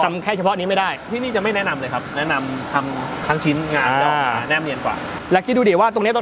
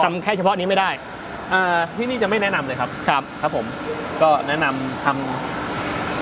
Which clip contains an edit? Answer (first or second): first